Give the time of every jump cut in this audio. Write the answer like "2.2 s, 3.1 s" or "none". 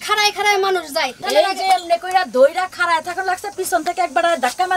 1.2 s

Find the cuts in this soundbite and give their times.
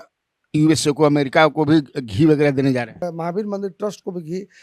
3.0 s

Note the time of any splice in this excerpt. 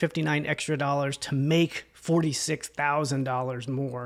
none

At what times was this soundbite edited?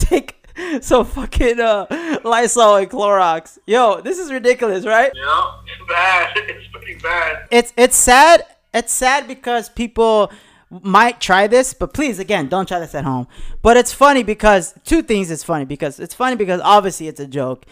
5.2 s, 7.5 s

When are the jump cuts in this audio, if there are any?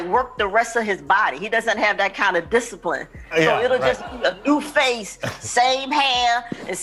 none

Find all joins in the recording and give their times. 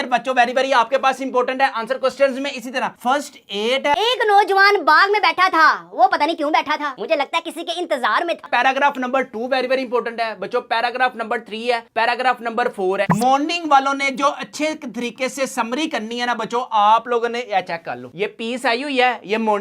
3.9 s, 8.5 s, 13.0 s

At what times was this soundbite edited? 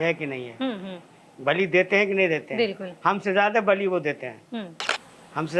none

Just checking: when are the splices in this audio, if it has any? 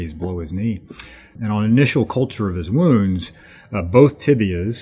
0.9 s

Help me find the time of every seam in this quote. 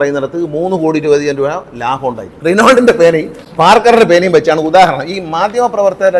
2.3 s

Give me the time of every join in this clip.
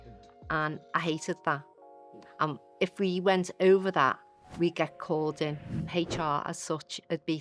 5.8 s

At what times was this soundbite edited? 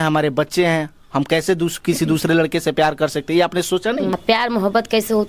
4.1 s

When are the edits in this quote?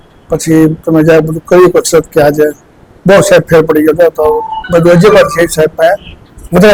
none

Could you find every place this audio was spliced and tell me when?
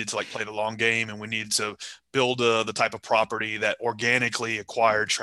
none

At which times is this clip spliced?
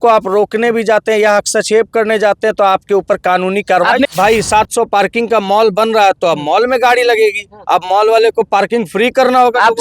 4.1 s

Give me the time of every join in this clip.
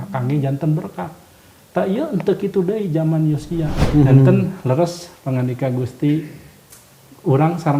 3.8 s

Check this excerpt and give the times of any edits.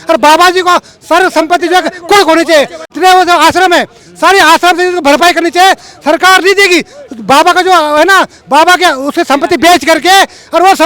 2.8 s

